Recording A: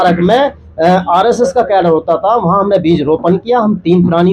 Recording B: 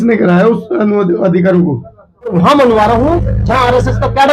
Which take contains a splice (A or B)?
B